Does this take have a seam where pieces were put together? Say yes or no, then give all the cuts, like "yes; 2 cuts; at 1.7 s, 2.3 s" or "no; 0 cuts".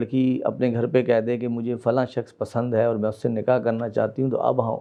no; 0 cuts